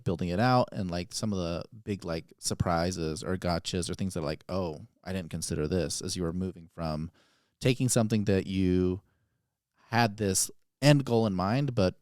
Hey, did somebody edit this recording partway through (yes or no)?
no